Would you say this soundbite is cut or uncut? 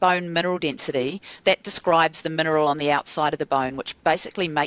uncut